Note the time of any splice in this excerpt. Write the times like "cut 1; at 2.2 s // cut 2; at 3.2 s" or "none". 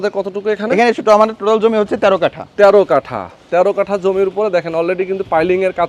none